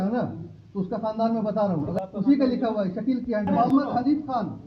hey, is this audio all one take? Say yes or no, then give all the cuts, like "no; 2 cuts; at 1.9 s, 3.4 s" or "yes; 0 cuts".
no; 2 cuts; at 1.9 s, 3.5 s